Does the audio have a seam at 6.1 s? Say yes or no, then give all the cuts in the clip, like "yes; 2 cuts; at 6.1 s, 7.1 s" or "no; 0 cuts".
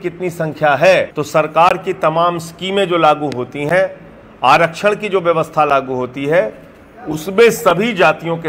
no; 1 cut; at 1.2 s